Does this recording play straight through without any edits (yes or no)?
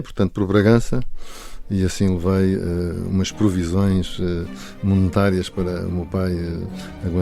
yes